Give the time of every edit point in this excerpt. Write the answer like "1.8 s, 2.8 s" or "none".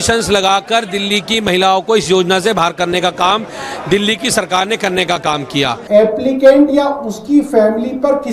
5.8 s